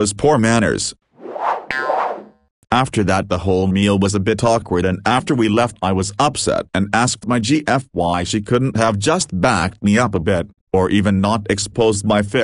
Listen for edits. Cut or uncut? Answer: cut